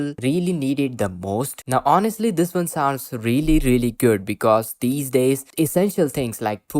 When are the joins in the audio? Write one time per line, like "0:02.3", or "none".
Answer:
0:01.6